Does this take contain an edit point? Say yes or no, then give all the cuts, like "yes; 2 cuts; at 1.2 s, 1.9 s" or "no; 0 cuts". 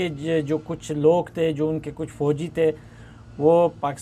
no; 0 cuts